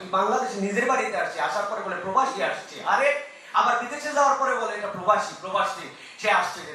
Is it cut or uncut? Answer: uncut